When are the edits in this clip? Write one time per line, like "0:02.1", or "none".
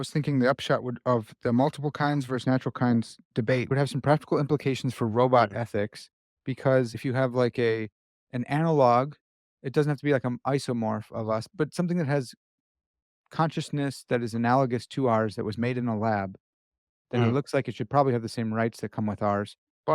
0:03.7
0:07.0
0:11.5

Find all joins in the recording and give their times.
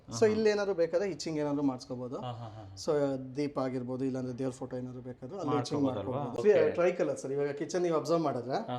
0:06.3

